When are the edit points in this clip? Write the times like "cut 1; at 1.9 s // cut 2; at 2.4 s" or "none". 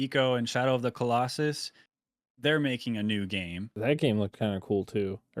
cut 1; at 3.8 s